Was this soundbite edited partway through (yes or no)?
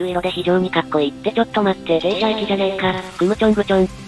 no